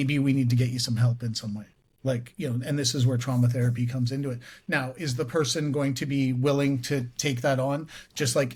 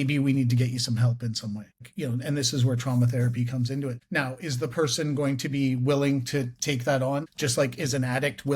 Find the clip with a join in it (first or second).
second